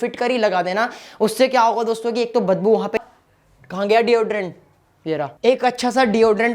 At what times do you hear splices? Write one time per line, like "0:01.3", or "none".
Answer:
0:03.0
0:05.3